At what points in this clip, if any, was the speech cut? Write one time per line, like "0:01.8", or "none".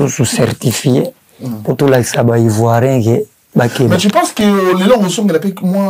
none